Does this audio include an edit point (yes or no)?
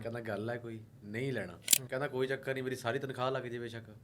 yes